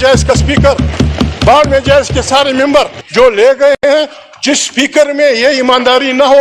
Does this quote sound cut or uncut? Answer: cut